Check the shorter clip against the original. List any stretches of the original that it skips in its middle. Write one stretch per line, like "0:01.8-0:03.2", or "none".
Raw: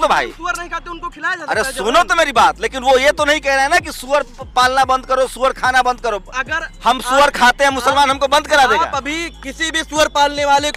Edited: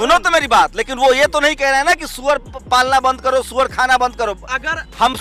none